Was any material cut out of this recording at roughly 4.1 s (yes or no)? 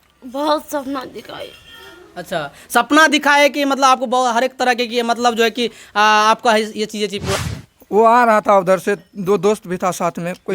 no